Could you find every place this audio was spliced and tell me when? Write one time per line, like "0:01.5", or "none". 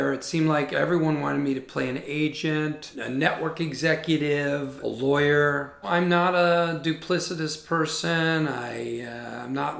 0:02.9

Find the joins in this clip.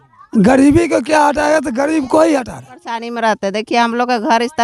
0:03.0

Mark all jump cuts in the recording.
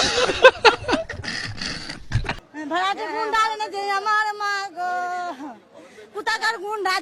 0:02.3

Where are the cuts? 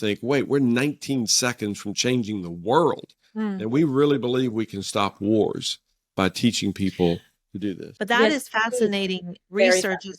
0:06.1
0:07.9

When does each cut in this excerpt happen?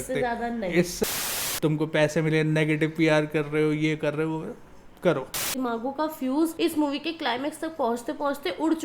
0:01.0
0:05.5

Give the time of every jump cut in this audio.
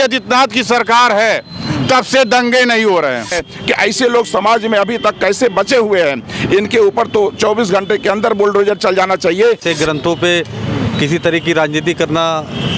0:03.4
0:09.6

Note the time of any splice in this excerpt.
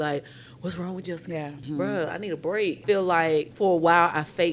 0:01.6
0:02.8
0:03.5

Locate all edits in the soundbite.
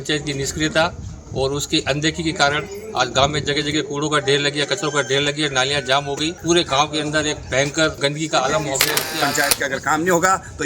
0:06.4
0:08.0
0:09.3

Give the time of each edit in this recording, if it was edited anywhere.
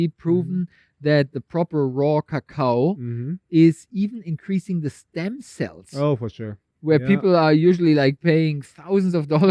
none

